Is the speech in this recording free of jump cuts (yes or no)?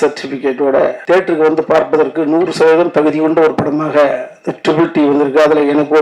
no